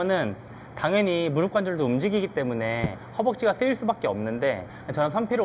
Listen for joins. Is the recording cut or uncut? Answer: uncut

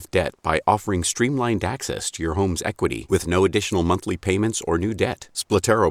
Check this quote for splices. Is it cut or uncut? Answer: uncut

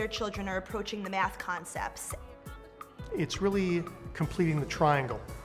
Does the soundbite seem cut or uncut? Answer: cut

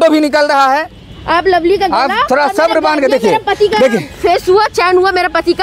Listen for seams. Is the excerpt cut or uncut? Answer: uncut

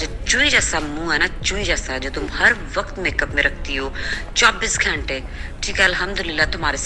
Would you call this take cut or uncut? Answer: uncut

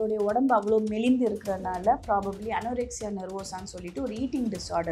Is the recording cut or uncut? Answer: uncut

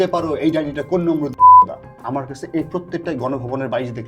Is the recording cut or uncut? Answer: cut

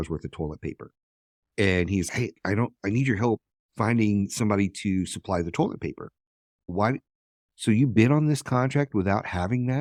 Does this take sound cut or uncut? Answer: uncut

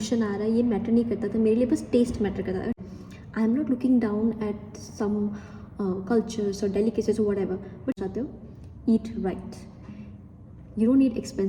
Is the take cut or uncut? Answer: cut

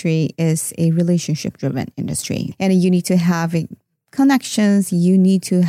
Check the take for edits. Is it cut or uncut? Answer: cut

